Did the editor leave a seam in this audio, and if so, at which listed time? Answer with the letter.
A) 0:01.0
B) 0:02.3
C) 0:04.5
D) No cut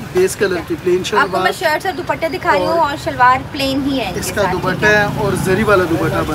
D